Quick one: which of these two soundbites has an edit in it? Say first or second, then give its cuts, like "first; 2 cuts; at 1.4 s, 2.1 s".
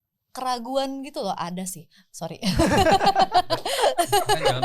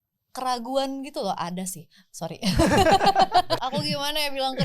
second; 1 cut; at 3.6 s